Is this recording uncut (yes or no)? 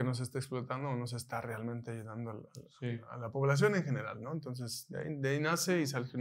yes